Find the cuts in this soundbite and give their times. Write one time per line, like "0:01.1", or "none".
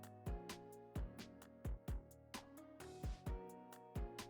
none